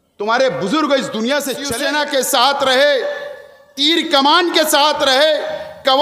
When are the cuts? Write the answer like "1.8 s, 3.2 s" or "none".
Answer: 1.6 s